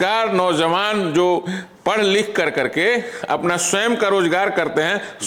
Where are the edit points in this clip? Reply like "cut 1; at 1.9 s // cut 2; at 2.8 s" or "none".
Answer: none